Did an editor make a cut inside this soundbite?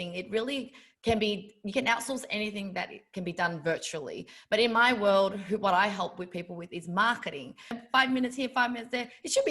yes; 1 cut; at 7.8 s

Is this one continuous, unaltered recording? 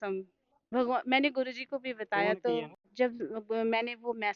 no; 1 cut; at 2.8 s

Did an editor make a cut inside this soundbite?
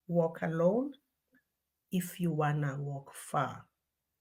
no; 0 cuts

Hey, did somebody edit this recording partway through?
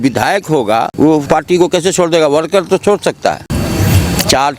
yes; 2 cuts; at 1.1 s, 3.5 s

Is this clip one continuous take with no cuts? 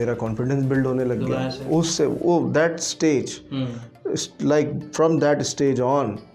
yes; 0 cuts

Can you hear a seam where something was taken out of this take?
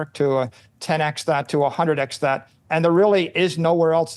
no; 0 cuts

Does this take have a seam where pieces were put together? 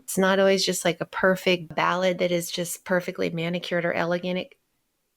yes; 1 cut; at 1.7 s

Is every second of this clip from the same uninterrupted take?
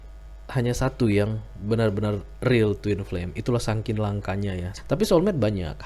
no; 1 cut; at 4.7 s

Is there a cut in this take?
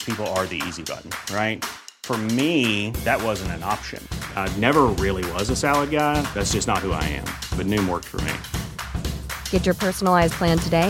no; 0 cuts

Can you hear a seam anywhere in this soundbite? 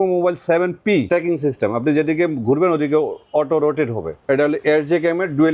yes; 2 cuts; at 1.1 s, 4.2 s

